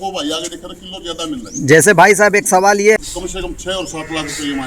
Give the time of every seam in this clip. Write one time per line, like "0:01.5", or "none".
0:03.0